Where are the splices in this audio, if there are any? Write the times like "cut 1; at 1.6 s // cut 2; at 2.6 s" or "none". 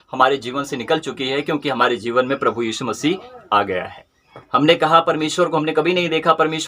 none